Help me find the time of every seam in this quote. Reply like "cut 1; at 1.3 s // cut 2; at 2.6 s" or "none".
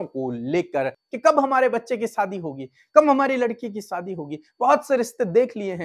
cut 1; at 1.0 s